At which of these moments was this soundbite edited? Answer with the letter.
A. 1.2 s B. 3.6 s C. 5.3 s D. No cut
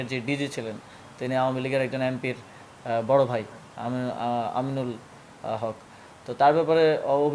D